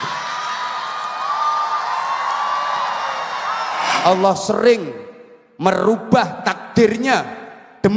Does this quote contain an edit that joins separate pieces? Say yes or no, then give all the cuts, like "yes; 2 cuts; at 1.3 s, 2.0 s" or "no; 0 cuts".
yes; 1 cut; at 3.9 s